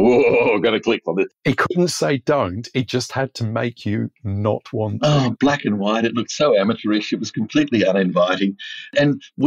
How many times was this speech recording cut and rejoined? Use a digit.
1